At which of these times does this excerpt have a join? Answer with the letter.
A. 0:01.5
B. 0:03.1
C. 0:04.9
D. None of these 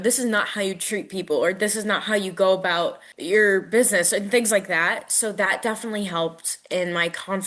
B